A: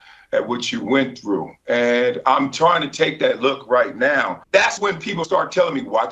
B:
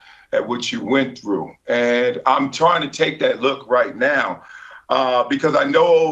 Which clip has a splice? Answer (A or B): A